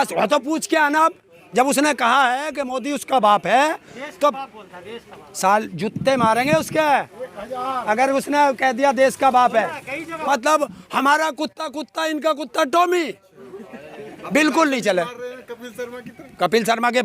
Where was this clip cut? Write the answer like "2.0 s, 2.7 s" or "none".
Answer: 10.1 s